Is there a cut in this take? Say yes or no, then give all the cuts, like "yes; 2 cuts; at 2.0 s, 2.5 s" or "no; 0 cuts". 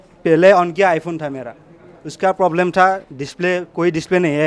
no; 0 cuts